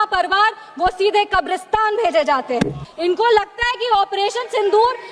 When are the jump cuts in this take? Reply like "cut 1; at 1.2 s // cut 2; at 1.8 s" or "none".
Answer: cut 1; at 2.8 s